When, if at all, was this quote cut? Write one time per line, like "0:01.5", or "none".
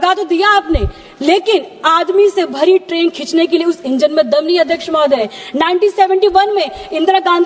0:02.9
0:05.4